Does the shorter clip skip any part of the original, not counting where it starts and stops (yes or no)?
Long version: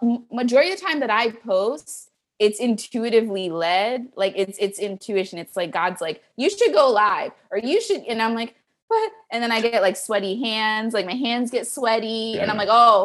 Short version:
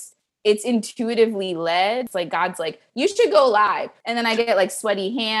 yes